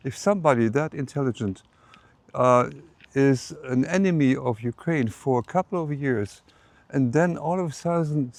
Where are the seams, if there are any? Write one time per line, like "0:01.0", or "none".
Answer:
none